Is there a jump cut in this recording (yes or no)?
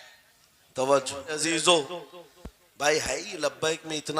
yes